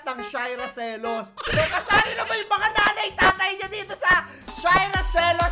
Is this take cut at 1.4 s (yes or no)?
yes